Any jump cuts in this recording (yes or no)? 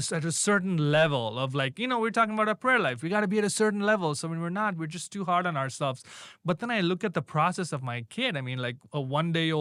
no